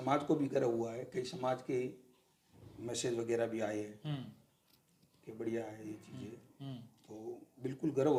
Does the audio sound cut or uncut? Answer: uncut